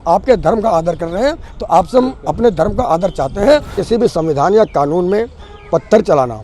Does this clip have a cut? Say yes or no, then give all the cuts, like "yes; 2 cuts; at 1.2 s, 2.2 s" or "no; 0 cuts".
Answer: yes; 1 cut; at 3.8 s